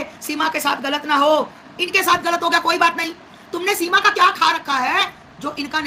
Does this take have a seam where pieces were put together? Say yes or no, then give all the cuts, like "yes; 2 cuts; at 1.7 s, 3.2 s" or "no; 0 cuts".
no; 0 cuts